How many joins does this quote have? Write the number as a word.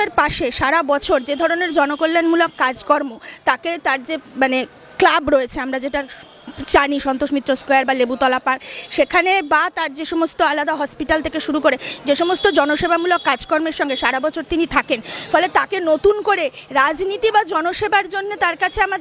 zero